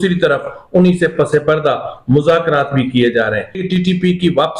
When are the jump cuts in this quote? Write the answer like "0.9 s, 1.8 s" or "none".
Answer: 3.6 s